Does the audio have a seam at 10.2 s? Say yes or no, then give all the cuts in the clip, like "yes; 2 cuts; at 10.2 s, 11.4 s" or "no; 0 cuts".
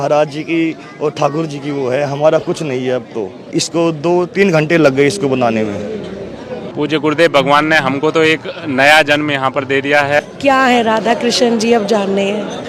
yes; 3 cuts; at 3.5 s, 6.6 s, 10.2 s